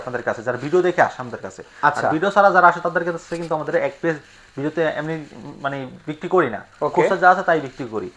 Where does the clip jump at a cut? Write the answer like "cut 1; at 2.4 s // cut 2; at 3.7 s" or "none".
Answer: none